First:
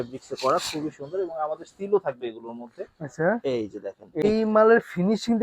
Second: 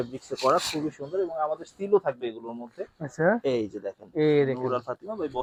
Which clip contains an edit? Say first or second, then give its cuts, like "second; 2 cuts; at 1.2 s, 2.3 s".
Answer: first; 1 cut; at 4.2 s